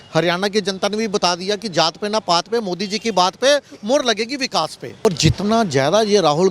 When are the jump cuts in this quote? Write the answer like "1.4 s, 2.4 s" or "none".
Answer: 5.0 s